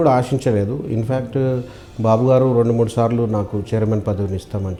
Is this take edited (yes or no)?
no